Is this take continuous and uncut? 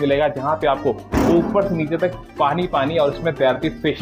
yes; 0 cuts

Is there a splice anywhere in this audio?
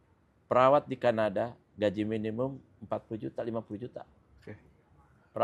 no; 0 cuts

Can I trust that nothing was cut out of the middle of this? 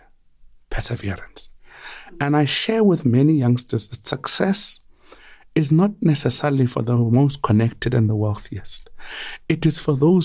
yes; 0 cuts

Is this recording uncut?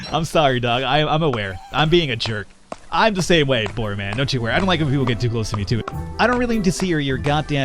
no; 1 cut; at 5.8 s

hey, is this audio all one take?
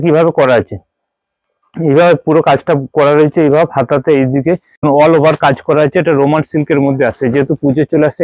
no; 1 cut; at 4.8 s

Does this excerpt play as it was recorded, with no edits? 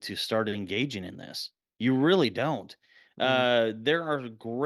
yes; 0 cuts

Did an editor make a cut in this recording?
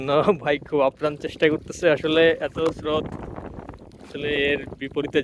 no; 0 cuts

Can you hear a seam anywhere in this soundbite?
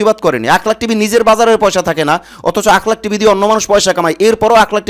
no; 0 cuts

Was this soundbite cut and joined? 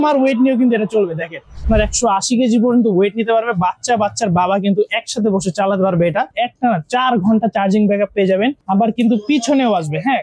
yes; 3 cuts; at 1.7 s, 6.3 s, 8.6 s

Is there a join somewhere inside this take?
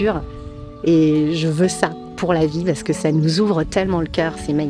no; 0 cuts

